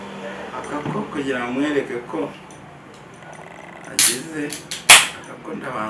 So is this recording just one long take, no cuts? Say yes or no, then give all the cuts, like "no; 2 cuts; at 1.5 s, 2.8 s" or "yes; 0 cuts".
yes; 0 cuts